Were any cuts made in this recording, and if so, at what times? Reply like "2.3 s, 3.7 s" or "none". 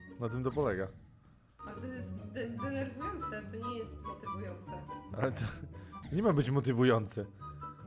none

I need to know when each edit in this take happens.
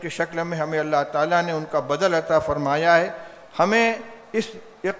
none

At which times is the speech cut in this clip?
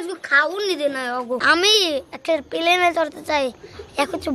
1.4 s

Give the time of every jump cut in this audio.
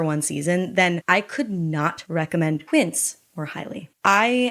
2.6 s

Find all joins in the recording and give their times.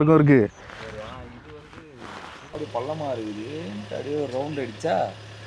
1.0 s, 2.6 s

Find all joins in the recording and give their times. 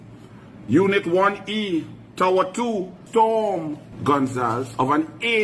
3.0 s, 3.8 s

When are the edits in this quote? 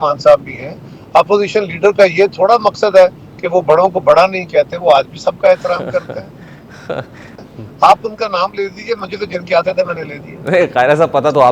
7.3 s

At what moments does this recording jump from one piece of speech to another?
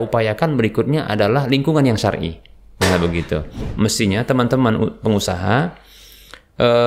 3.7 s

